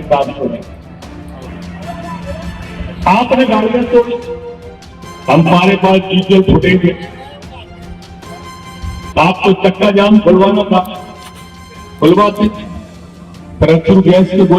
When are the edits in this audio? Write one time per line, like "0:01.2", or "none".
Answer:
0:01.5